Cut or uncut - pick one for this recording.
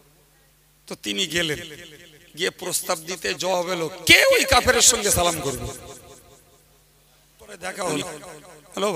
cut